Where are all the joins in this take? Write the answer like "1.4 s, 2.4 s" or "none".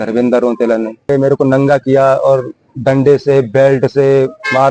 1.1 s